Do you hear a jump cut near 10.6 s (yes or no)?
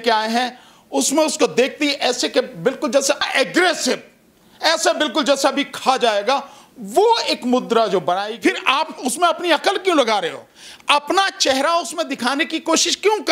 no